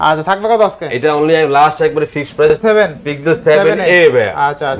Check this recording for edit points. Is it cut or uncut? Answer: cut